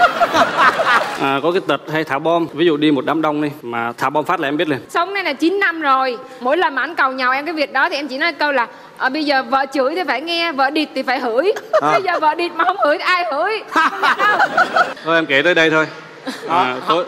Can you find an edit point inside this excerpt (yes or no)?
yes